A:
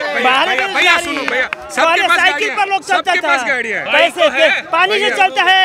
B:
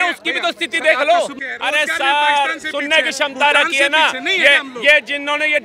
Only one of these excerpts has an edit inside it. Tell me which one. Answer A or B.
B